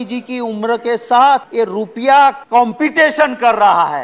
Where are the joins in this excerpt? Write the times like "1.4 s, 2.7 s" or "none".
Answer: 1.5 s, 2.4 s